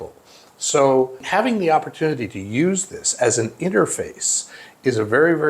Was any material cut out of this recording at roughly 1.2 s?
yes; 1 cut; at 1.2 s

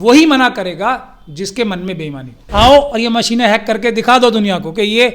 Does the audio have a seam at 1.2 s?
no; 1 cut; at 2.4 s

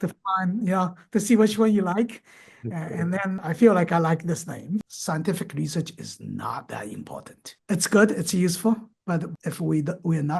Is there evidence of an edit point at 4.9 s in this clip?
yes; 2 cuts; at 4.9 s, 9.4 s

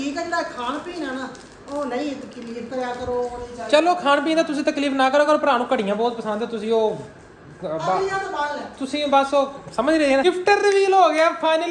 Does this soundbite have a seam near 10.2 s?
yes; 1 cut; at 10.2 s

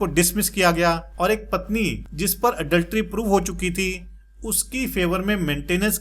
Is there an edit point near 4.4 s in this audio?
no; 2 cuts; at 1.1 s, 2.1 s

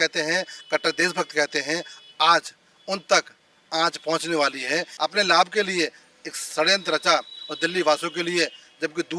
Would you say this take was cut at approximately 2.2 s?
no; 1 cut; at 4.9 s

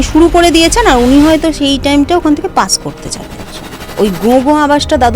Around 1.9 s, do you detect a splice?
no; 1 cut; at 3.4 s

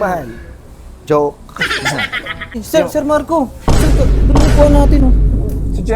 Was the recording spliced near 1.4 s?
no; 1 cut; at 2.6 s

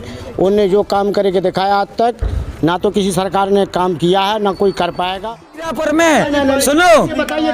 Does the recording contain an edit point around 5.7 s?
yes; 1 cut; at 5.7 s

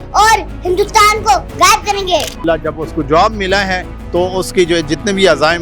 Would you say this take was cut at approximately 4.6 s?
no; 1 cut; at 2.4 s

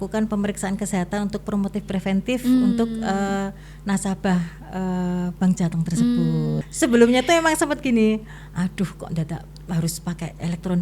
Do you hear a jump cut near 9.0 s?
no; 1 cut; at 6.6 s

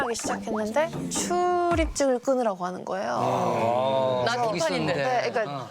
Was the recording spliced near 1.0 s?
yes; 1 cut; at 1.0 s

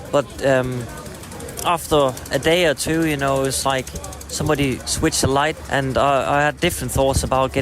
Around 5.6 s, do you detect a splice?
yes; 1 cut; at 5.6 s

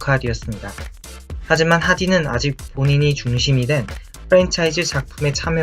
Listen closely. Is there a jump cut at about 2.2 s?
yes; 1 cut; at 2.2 s

